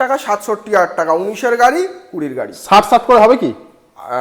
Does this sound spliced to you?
no; 0 cuts

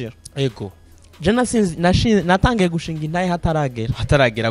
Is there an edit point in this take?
no; 0 cuts

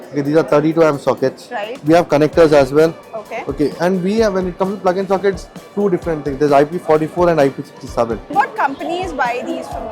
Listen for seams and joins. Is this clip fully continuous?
no; 2 cuts; at 1.8 s, 8.3 s

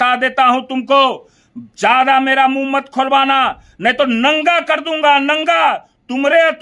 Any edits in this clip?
no; 0 cuts

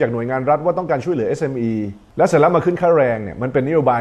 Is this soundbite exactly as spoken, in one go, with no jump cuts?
yes; 0 cuts

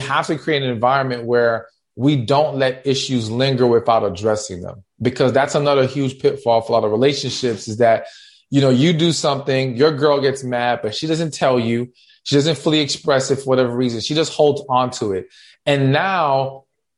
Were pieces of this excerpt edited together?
no; 0 cuts

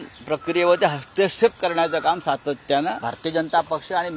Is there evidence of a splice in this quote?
yes; 1 cut; at 3.1 s

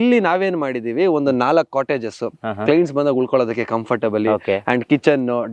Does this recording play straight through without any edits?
yes; 0 cuts

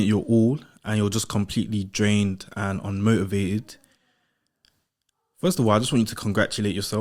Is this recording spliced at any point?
no; 0 cuts

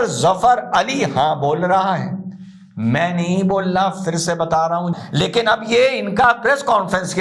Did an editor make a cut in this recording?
yes; 1 cut; at 4.9 s

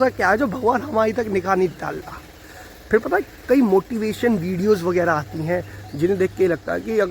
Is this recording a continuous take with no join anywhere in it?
yes; 0 cuts

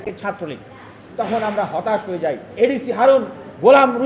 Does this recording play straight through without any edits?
no; 1 cut; at 2.5 s

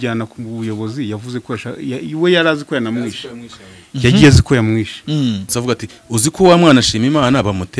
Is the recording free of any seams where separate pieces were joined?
no; 1 cut; at 5.5 s

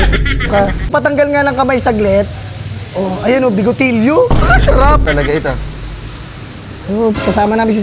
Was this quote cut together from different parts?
yes; 2 cuts; at 0.9 s, 5.0 s

